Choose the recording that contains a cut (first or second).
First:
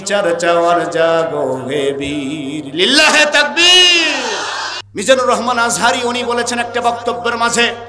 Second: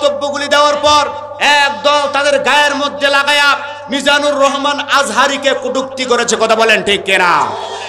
first